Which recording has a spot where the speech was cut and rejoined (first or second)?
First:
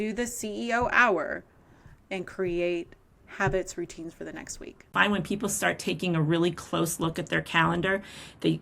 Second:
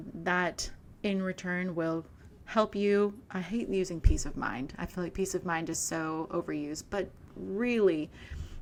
first